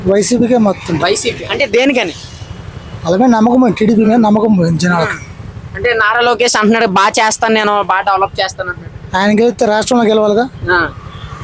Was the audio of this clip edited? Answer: no; 0 cuts

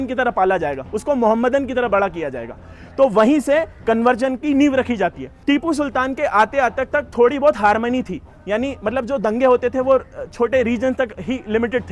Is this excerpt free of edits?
no; 1 cut; at 5.3 s

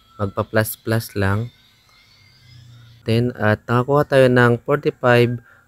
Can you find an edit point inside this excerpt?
yes; 1 cut; at 3.0 s

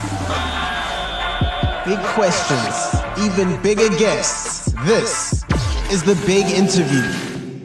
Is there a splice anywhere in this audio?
no; 0 cuts

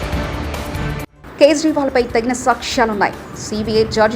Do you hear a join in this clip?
yes; 1 cut; at 1.1 s

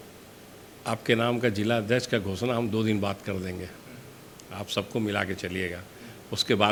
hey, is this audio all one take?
yes; 0 cuts

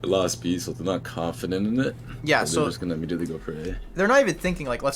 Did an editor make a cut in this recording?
no; 0 cuts

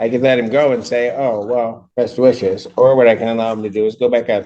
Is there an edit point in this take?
yes; 1 cut; at 1.8 s

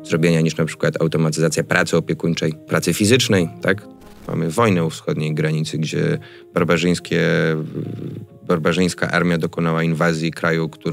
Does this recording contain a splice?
yes; 2 cuts; at 2.6 s, 4.0 s

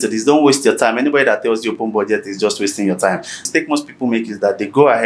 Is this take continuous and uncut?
no; 1 cut; at 3.5 s

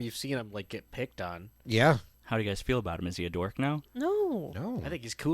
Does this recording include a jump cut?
yes; 1 cut; at 2.1 s

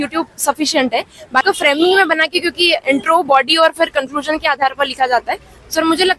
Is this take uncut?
no; 1 cut; at 1.4 s

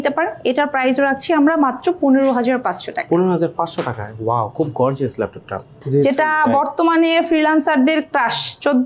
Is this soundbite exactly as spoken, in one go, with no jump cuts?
no; 1 cut; at 5.7 s

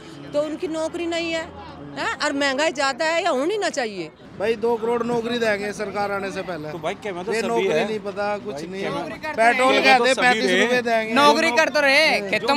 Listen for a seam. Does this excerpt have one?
yes; 1 cut; at 4.2 s

